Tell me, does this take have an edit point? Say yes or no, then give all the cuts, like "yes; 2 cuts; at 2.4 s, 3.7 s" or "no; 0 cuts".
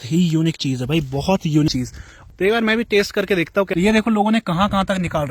yes; 2 cuts; at 1.8 s, 3.7 s